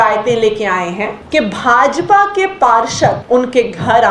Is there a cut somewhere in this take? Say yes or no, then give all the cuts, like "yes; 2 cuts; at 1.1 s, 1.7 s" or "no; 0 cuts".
yes; 2 cuts; at 1.2 s, 3.2 s